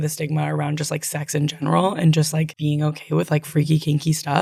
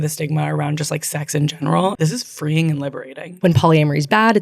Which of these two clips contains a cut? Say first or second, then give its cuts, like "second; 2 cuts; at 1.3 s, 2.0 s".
second; 2 cuts; at 1.9 s, 3.3 s